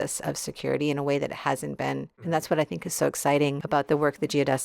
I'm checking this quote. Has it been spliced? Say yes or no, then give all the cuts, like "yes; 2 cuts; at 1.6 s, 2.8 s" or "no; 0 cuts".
yes; 2 cuts; at 2.2 s, 3.6 s